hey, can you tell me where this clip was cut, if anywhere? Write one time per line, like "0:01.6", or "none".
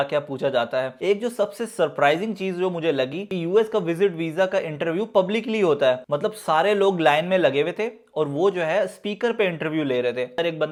none